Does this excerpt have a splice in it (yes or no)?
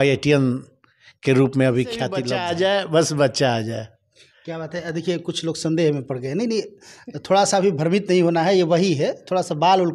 yes